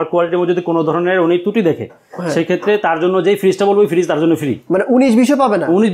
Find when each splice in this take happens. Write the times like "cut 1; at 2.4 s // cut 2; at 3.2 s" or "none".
none